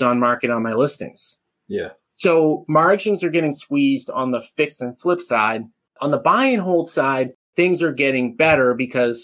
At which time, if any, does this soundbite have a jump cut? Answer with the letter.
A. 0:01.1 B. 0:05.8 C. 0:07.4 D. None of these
C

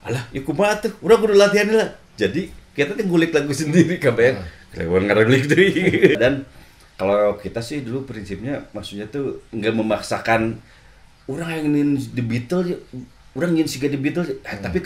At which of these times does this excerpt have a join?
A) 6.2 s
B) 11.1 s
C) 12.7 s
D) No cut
A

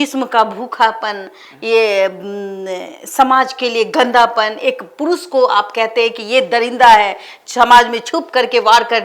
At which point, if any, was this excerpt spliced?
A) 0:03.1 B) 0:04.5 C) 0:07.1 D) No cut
D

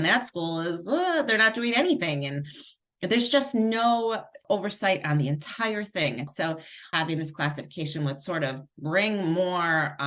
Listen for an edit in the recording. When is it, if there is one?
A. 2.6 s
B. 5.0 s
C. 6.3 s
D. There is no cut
C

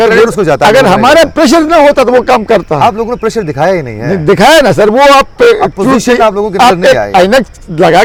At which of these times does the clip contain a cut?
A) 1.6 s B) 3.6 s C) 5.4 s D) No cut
D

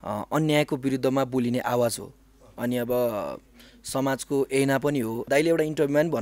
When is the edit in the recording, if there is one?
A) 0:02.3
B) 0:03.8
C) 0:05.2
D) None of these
C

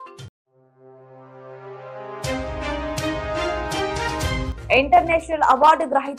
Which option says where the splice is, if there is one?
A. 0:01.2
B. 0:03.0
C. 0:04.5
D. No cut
D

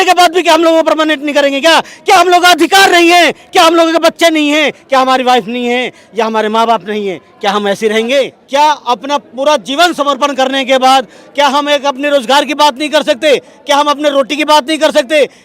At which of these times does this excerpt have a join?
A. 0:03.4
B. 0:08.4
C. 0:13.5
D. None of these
B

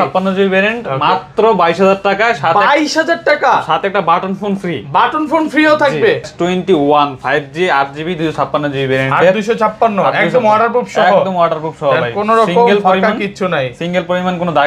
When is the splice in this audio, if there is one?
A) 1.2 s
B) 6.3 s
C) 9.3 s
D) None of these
B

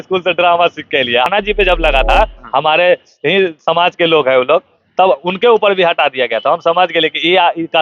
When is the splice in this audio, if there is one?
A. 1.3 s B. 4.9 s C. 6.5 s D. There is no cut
A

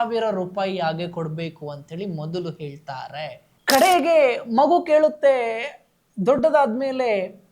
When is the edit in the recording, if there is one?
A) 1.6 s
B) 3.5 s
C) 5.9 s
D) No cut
B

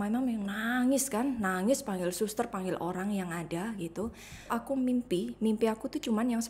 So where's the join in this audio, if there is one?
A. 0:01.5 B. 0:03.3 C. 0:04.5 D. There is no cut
C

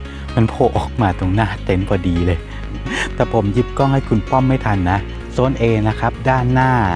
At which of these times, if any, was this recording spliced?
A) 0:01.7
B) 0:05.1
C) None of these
B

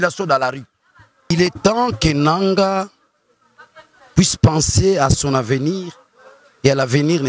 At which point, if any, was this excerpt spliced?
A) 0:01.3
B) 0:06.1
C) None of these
A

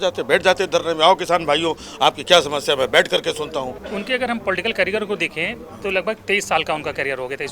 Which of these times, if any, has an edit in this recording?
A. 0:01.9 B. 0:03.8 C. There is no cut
B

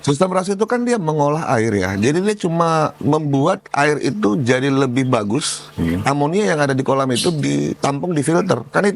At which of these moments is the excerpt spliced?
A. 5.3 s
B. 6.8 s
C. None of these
C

